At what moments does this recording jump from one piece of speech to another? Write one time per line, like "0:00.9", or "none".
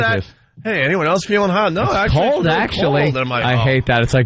0:02.6